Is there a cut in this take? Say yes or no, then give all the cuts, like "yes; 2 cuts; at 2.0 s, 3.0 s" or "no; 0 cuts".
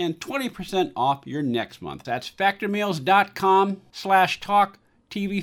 yes; 1 cut; at 2.0 s